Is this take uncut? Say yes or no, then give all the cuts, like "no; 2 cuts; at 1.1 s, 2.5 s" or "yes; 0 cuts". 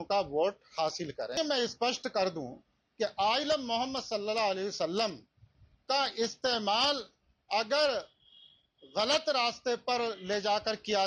no; 1 cut; at 1.3 s